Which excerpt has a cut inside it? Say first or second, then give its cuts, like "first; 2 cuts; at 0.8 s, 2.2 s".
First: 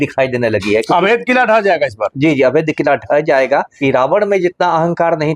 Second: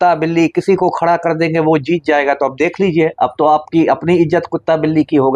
first; 1 cut; at 3.7 s